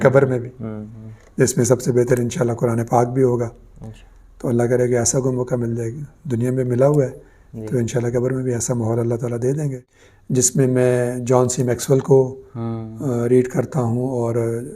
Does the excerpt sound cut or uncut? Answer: cut